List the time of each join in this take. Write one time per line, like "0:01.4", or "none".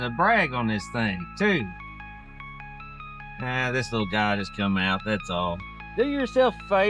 0:05.8